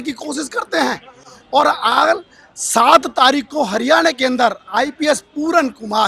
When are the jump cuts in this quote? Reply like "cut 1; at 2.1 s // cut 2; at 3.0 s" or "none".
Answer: none